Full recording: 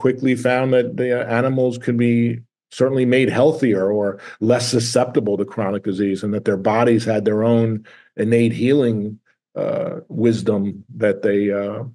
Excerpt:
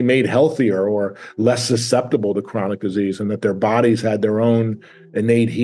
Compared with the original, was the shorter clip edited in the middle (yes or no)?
no